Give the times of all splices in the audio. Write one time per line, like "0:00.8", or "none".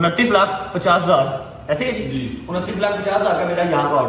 none